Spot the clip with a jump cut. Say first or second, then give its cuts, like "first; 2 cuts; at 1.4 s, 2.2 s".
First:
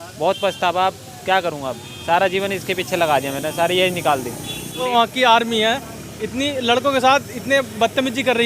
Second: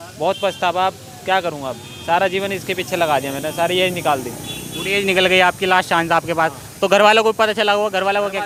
first; 1 cut; at 4.9 s